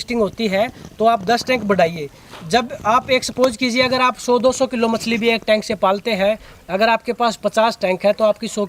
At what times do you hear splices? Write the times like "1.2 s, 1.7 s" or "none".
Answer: none

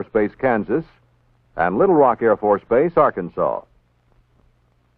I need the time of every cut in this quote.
none

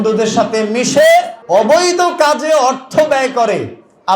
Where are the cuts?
1.4 s

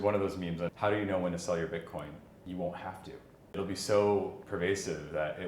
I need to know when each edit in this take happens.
0.7 s, 2.3 s, 3.6 s

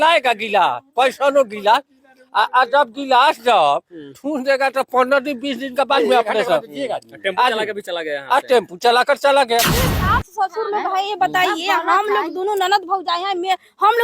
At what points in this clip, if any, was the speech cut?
9.8 s

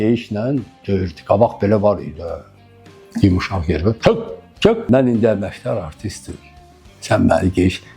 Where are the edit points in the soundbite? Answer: 4.8 s

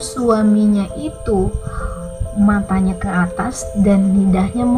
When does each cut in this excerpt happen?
none

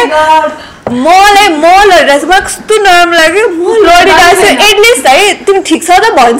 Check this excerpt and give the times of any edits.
none

